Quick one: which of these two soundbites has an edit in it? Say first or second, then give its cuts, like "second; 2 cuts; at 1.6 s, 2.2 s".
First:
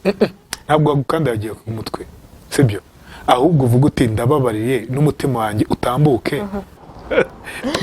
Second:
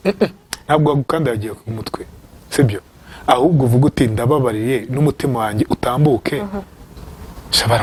first; 1 cut; at 6.9 s